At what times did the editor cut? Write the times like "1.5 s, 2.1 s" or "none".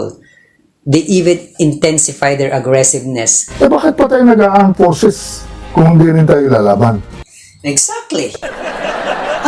3.5 s